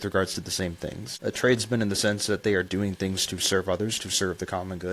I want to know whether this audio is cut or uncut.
cut